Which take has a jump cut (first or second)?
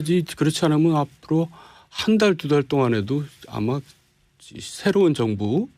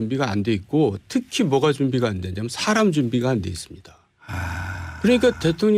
first